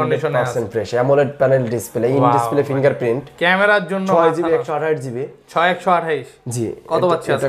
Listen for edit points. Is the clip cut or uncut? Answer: uncut